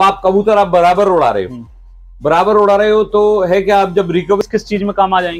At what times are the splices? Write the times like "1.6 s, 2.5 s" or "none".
4.4 s